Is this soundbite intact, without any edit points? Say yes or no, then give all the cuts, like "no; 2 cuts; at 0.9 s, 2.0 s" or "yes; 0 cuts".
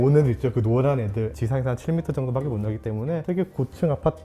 no; 1 cut; at 1.4 s